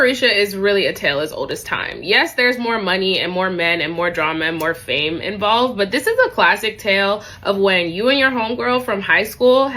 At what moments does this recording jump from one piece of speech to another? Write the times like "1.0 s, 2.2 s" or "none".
none